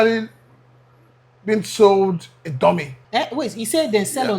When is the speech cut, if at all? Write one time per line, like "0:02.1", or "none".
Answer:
0:02.9